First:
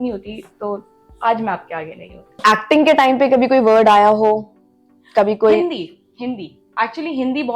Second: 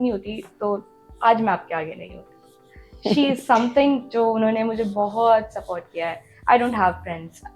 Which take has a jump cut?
first; 1 cut; at 2.4 s

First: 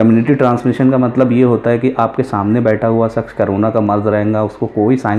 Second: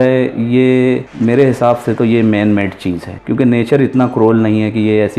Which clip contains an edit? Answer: second; 2 cuts; at 1.1 s, 3.1 s

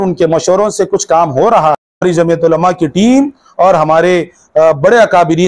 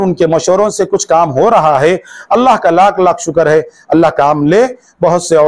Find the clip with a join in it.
first; 1 cut; at 2.0 s

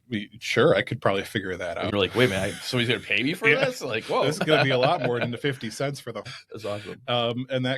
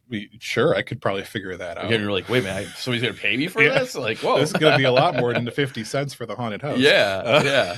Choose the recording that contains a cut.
first; 2 cuts; at 1.9 s, 6.3 s

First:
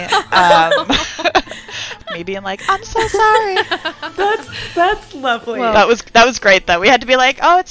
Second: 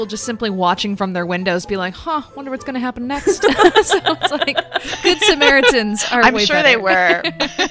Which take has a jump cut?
first; 1 cut; at 1.9 s

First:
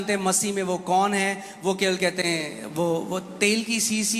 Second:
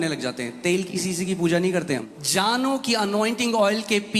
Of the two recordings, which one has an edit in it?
second; 1 cut; at 2.1 s

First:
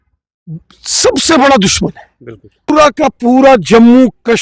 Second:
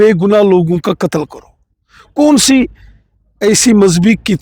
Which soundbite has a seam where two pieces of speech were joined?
first; 1 cut; at 2.7 s

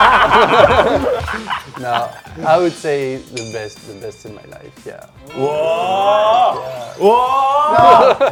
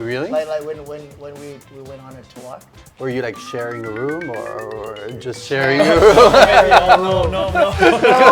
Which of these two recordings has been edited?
second; 1 cut; at 2.6 s

